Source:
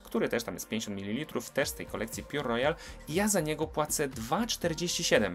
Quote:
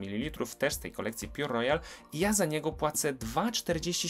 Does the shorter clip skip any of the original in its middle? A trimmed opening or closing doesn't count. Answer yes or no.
no